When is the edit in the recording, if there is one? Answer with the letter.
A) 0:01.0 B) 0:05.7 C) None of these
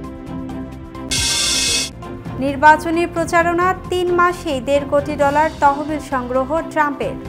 A